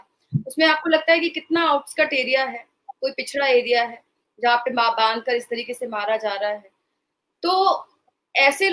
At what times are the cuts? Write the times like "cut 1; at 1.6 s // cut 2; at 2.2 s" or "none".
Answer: none